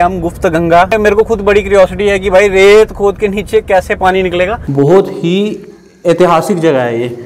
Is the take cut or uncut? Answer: cut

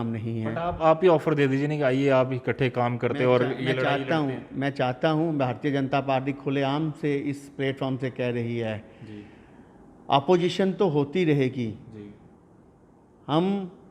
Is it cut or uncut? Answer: uncut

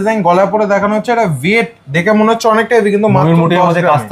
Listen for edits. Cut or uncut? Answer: uncut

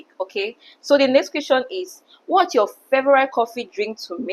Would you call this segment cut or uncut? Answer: uncut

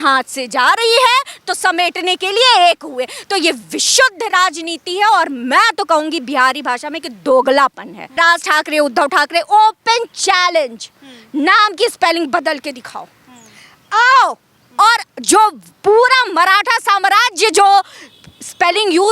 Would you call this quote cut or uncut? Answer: cut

